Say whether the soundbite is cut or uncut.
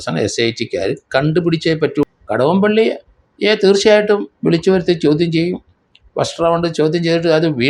cut